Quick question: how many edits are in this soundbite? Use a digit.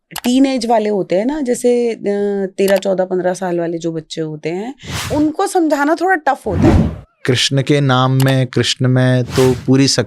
2